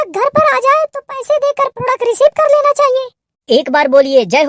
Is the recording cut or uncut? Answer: cut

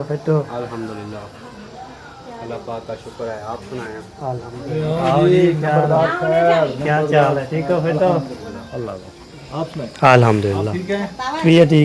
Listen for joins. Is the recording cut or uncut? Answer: uncut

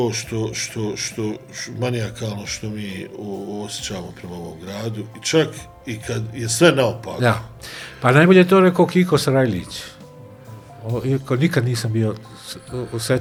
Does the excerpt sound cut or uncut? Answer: uncut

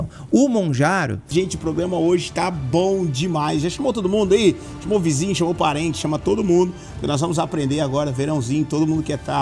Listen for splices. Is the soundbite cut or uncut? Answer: cut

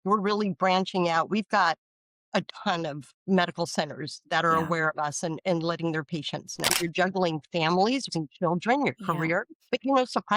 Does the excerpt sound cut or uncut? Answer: cut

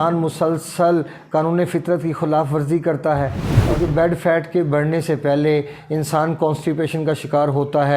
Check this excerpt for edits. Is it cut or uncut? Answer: cut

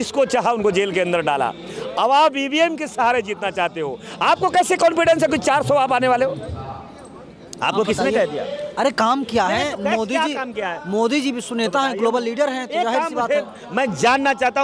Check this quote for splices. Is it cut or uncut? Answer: uncut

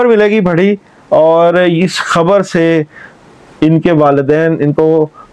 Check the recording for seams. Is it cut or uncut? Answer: uncut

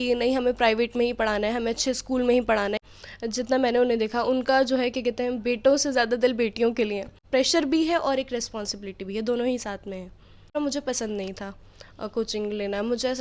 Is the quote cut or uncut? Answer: cut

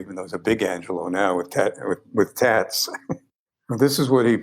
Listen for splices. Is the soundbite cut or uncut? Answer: cut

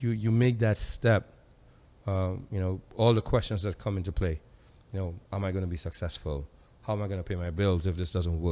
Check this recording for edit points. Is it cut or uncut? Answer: uncut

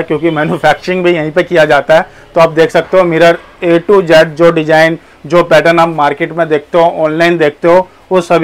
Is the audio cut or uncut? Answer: uncut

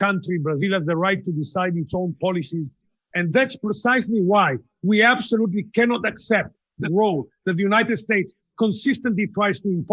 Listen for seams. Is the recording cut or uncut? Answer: cut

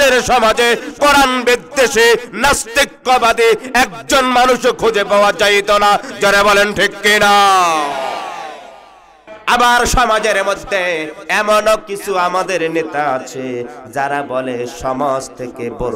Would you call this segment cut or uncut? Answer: cut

